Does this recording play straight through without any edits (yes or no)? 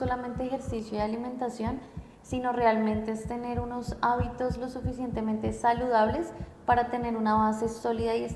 yes